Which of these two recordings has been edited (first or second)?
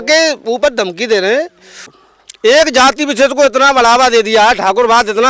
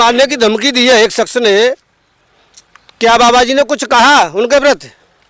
first